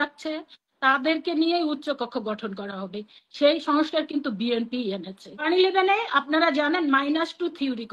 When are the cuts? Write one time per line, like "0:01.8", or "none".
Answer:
0:05.4